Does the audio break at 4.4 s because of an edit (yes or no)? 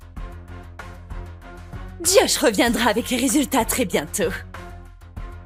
no